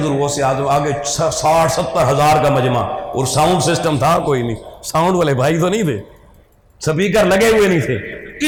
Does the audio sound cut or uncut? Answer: uncut